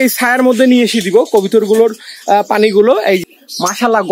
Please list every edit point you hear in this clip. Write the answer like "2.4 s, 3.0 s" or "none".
3.2 s